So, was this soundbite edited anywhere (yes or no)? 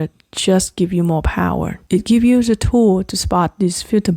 yes